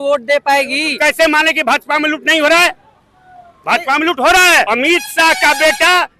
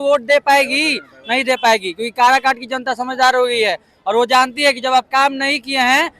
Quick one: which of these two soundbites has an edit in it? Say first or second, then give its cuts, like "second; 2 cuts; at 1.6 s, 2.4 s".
first; 2 cuts; at 1.0 s, 4.7 s